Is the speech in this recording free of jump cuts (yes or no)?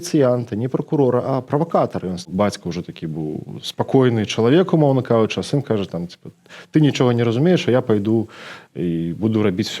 no